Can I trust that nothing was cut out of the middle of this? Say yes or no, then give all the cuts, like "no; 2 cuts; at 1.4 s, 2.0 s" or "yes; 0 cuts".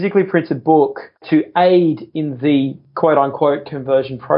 no; 1 cut; at 1.2 s